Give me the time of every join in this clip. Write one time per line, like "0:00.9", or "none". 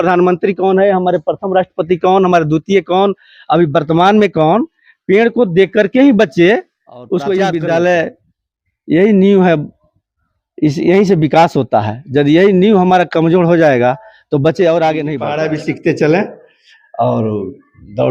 0:07.4
0:15.2